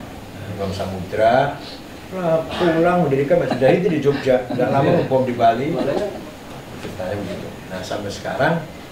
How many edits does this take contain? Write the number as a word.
one